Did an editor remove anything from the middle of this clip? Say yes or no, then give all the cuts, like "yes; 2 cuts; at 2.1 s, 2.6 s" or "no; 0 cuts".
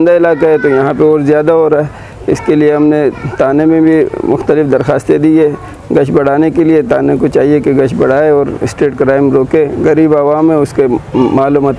no; 0 cuts